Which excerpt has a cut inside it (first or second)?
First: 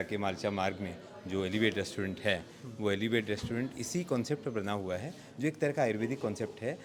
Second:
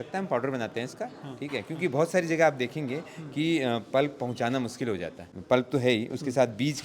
second